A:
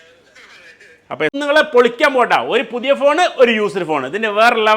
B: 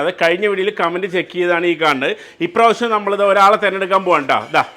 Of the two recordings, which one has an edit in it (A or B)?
A